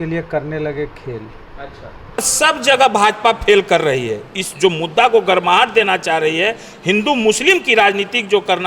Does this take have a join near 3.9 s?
no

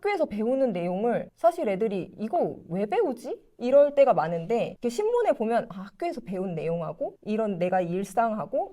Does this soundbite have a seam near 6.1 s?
no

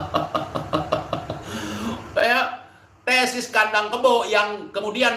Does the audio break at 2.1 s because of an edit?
no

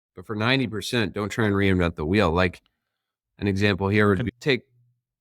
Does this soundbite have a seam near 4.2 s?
yes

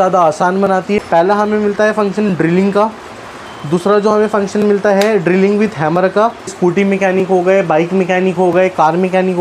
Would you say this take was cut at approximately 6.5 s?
yes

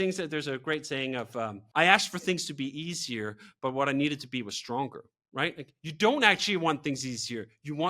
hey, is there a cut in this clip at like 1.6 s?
yes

